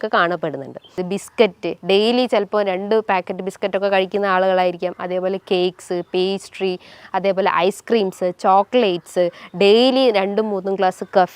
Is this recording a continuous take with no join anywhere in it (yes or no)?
no